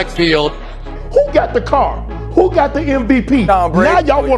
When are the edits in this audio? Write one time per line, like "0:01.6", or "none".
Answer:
0:01.0